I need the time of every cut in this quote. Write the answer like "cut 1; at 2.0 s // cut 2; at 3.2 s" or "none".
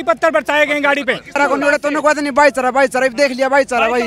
cut 1; at 1.4 s